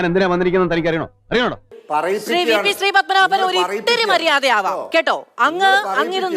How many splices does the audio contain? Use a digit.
1